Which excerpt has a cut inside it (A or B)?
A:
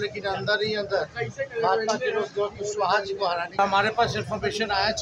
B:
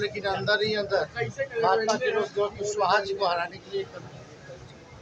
A